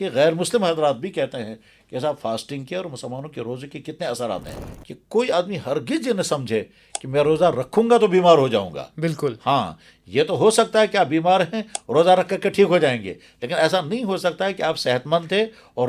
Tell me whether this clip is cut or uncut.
cut